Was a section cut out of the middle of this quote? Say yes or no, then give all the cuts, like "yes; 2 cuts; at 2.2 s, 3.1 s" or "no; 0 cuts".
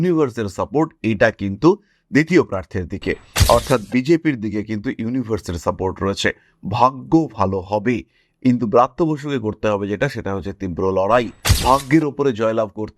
yes; 1 cut; at 11.5 s